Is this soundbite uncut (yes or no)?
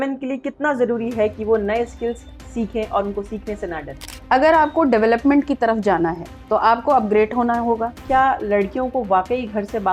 no